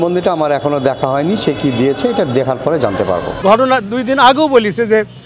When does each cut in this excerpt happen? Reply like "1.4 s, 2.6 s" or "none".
3.3 s